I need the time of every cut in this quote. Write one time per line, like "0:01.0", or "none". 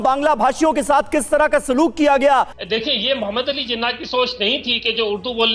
0:02.6